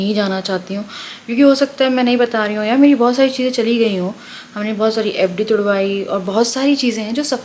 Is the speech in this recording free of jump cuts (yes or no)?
yes